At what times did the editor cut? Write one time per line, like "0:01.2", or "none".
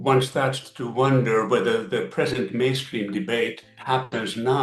none

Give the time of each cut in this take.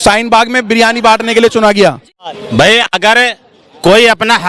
0:02.2

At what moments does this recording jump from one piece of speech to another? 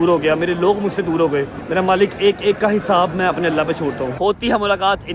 0:01.6
0:04.1

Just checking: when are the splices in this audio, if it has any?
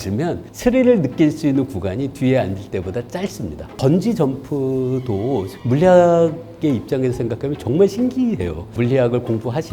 0:03.7
0:08.7

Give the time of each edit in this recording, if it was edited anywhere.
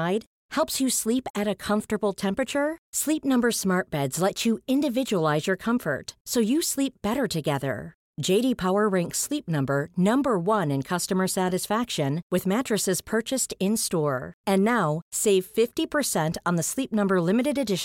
none

